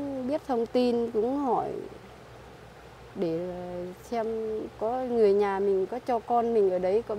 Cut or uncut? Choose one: uncut